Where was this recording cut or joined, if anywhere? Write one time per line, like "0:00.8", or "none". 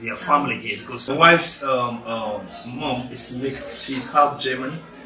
0:01.1